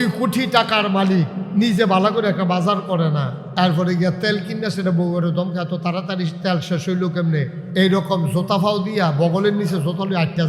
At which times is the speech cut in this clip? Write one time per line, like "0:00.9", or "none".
0:01.4
0:03.4
0:07.6